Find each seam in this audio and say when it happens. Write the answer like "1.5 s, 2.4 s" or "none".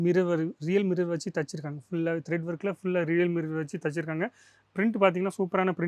none